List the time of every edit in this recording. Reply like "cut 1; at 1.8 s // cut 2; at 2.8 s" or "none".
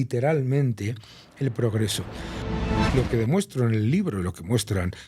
cut 1; at 2.7 s